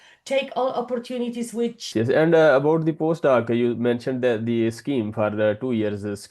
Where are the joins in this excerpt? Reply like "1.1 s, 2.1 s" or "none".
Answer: 1.9 s